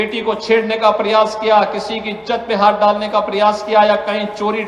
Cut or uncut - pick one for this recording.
cut